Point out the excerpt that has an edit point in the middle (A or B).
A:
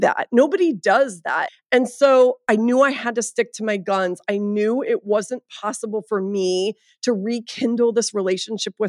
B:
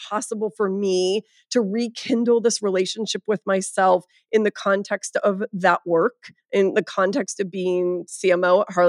A